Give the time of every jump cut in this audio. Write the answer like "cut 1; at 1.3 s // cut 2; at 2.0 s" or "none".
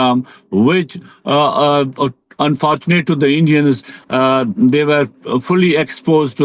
none